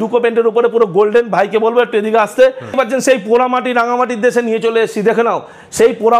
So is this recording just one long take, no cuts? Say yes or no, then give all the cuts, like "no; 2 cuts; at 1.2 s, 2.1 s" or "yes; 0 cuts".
yes; 0 cuts